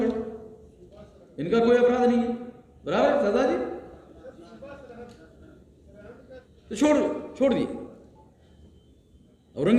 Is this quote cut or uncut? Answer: cut